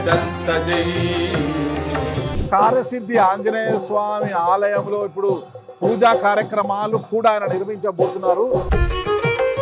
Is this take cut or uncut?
cut